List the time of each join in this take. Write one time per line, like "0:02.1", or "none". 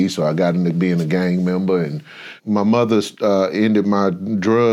0:02.3